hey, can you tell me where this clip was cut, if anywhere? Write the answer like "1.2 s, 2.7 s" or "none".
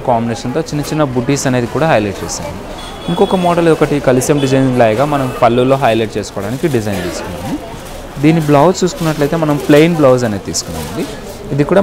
none